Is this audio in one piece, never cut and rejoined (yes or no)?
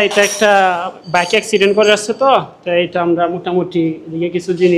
yes